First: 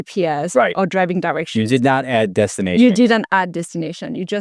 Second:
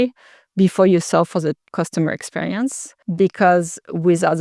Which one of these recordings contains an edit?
second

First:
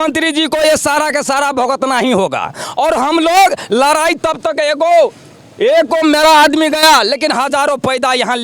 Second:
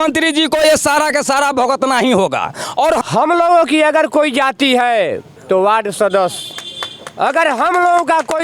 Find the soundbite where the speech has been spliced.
second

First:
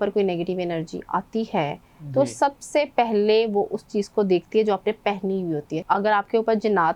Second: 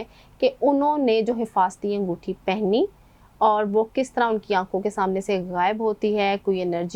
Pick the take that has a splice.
first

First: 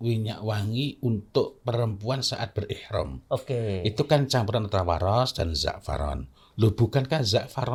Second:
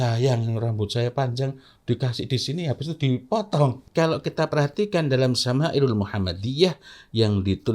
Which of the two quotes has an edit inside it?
second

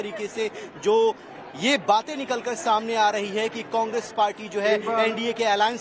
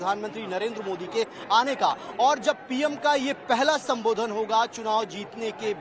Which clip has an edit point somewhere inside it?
first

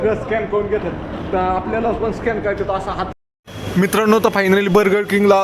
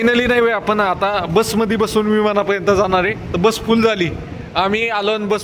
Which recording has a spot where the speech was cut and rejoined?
first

